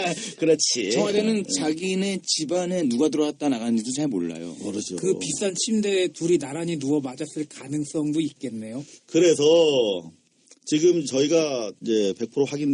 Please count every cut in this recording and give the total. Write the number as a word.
one